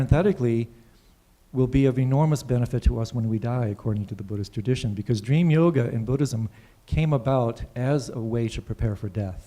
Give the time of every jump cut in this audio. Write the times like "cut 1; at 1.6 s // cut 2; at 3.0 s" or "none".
cut 1; at 1.4 s